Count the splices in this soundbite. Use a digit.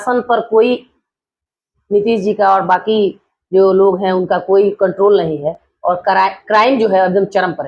0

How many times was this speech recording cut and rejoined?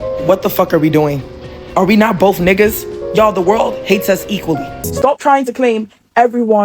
1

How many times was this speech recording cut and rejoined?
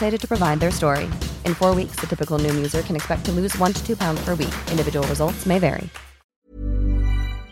1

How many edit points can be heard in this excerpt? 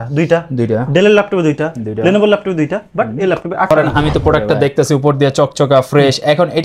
1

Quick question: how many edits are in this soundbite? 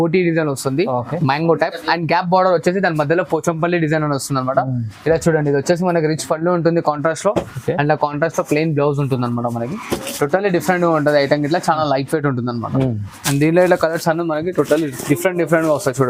0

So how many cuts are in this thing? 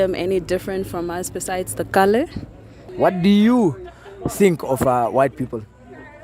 1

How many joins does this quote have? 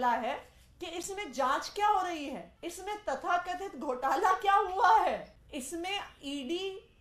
2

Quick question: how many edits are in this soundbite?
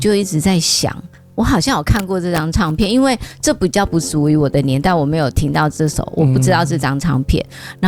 0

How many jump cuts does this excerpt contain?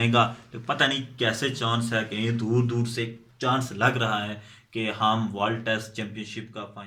0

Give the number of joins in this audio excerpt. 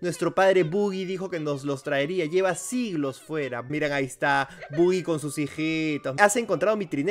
2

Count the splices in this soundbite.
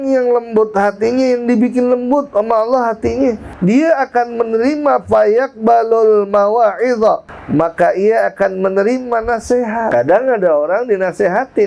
3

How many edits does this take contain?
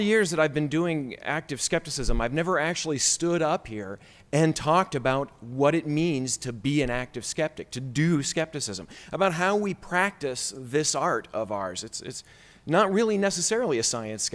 1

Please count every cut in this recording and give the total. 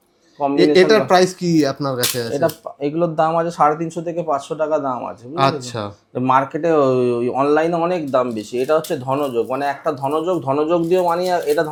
0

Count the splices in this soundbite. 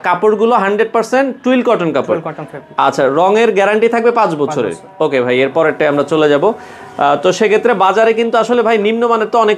0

